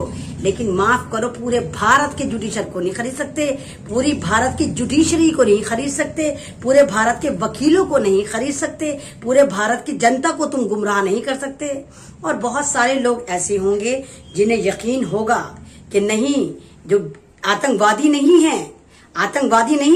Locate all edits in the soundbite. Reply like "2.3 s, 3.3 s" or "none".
none